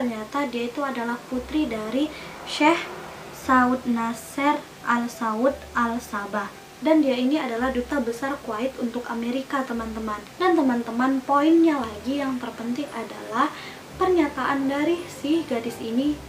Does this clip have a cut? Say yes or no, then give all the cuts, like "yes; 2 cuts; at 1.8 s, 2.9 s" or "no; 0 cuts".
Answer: no; 0 cuts